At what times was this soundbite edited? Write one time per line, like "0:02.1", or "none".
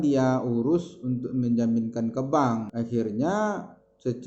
0:02.7